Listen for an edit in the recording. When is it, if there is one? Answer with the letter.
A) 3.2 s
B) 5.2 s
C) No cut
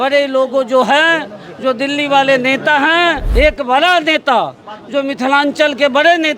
A